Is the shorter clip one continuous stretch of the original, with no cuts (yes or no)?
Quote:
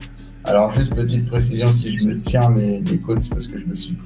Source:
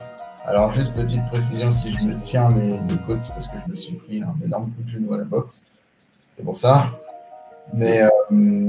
yes